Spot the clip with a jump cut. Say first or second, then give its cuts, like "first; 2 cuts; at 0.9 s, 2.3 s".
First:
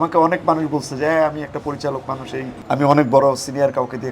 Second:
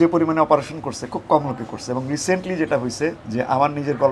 first; 1 cut; at 2.6 s